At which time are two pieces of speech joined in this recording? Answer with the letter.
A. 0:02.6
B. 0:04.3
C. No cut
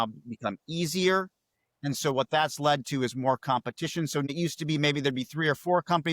B